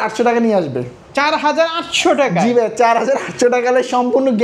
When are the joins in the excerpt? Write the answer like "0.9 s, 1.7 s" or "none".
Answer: none

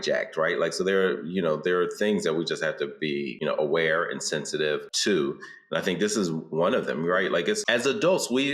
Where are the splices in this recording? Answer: 3.3 s, 4.9 s, 7.6 s

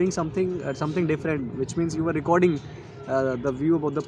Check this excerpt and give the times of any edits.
none

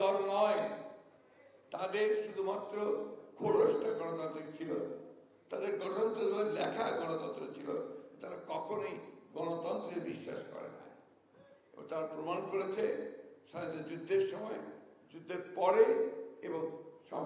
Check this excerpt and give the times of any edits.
none

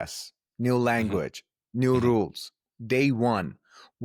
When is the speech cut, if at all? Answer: none

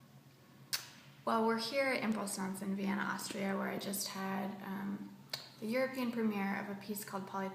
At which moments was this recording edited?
none

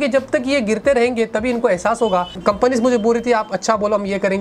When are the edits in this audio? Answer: 2.3 s

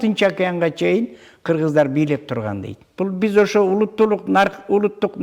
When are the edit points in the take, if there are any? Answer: 2.8 s

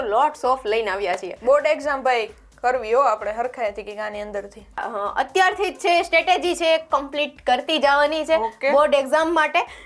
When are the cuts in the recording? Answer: 4.8 s

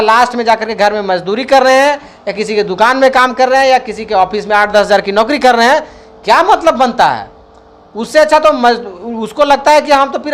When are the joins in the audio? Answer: none

